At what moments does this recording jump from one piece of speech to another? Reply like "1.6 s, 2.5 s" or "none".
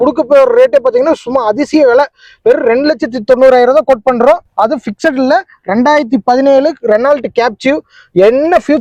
none